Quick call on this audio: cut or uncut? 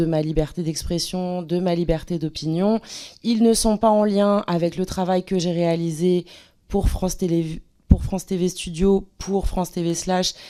uncut